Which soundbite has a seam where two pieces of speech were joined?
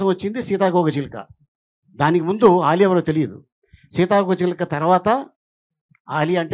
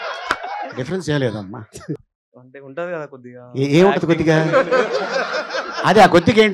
second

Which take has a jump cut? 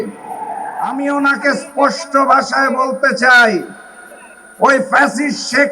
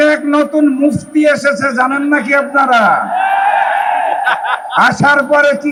first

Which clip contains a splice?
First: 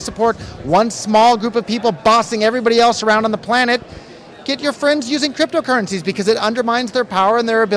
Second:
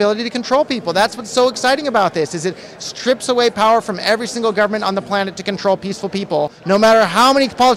second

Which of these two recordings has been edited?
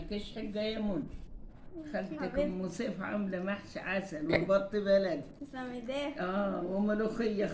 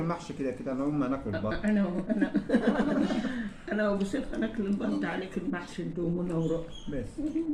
second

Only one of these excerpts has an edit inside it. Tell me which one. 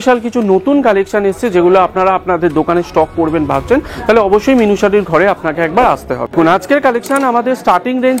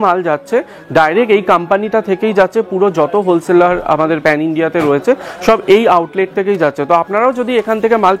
first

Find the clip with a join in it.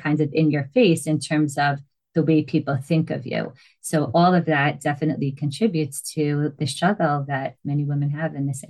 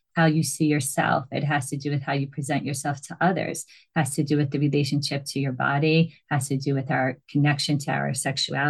first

